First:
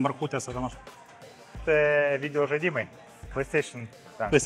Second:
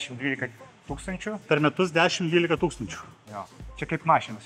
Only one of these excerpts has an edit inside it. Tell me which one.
first; 1 cut; at 1.5 s

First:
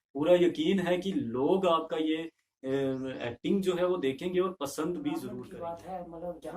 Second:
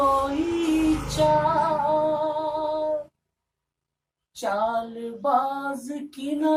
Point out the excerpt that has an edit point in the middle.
first; 1 cut; at 5.4 s

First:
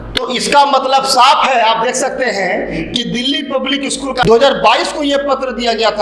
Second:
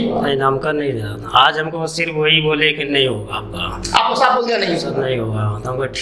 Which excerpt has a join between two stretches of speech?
first; 1 cut; at 4.2 s

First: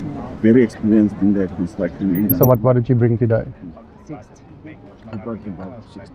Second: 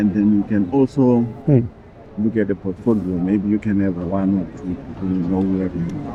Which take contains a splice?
first; 1 cut; at 2.3 s

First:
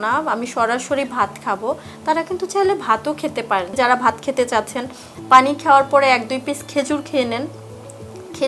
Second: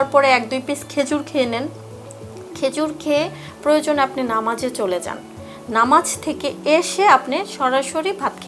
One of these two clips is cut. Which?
first; 1 cut; at 3.8 s

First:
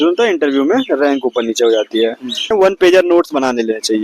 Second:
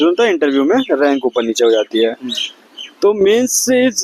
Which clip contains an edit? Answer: first; 1 cut; at 2.5 s

